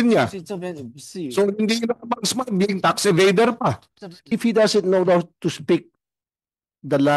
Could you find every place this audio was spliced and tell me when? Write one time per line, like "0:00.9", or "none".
0:04.1